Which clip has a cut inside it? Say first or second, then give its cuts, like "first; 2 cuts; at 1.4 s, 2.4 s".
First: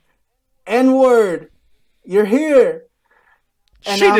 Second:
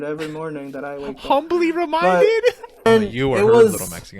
second; 1 cut; at 2.9 s